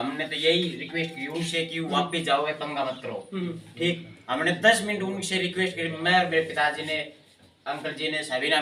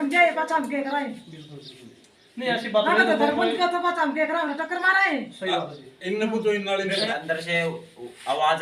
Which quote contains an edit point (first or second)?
second